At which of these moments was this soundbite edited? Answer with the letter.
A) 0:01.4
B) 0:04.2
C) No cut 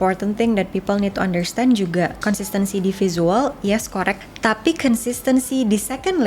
B